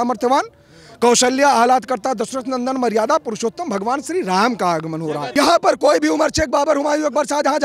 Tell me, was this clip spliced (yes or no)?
yes